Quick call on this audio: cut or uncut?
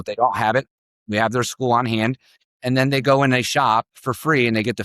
uncut